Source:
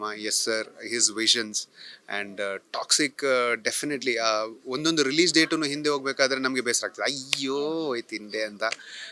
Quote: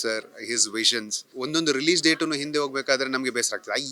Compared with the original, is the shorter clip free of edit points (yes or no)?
no